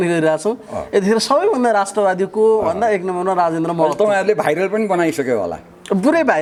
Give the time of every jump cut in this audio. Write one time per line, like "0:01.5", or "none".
none